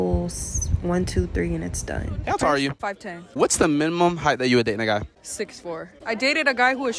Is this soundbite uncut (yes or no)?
no